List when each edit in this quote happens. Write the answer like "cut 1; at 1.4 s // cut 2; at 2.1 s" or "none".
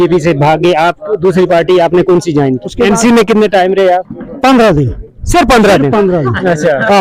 cut 1; at 2.7 s // cut 2; at 4.2 s

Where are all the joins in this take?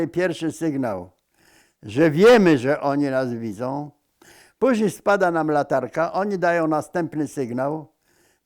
none

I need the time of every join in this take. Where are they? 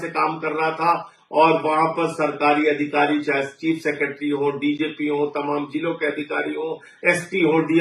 none

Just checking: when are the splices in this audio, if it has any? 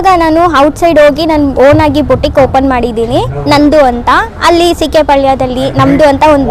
none

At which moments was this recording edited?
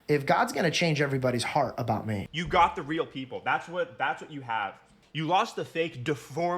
cut 1; at 2.2 s

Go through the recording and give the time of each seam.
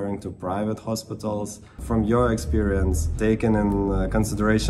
cut 1; at 1.8 s // cut 2; at 3.1 s

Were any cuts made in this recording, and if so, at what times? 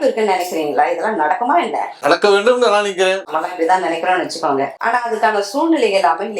none

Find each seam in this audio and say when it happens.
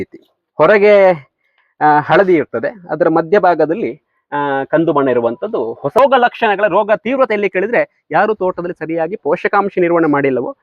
cut 1; at 6.0 s

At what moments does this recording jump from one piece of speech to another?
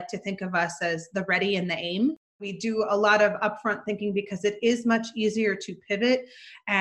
cut 1; at 2.5 s

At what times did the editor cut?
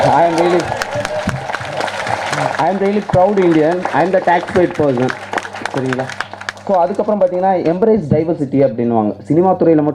none

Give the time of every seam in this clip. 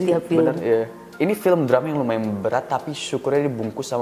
cut 1; at 1.0 s

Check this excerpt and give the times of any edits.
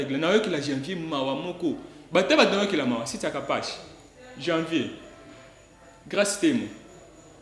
none

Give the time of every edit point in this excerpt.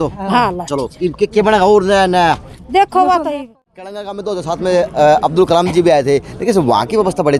cut 1; at 3.7 s

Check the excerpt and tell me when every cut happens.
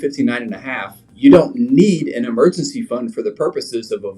cut 1; at 1.0 s

